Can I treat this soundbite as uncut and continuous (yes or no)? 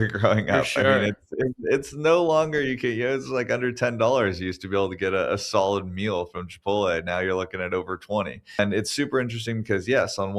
no